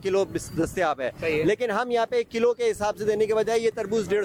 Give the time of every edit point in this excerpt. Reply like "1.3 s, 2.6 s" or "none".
none